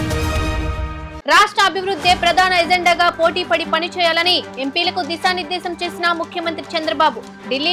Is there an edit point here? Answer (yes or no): yes